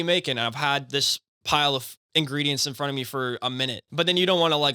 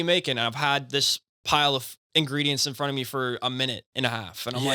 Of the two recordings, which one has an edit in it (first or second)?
first